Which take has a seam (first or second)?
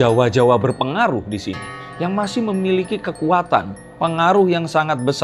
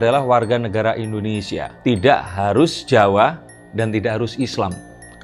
second